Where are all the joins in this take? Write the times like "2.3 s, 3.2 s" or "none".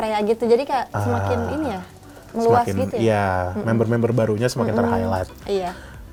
none